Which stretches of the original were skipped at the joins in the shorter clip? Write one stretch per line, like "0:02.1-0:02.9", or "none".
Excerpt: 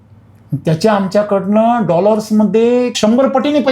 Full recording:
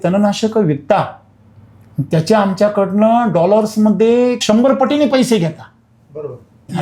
none